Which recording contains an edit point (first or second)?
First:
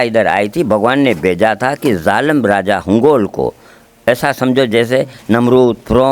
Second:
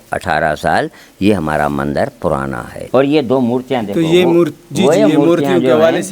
second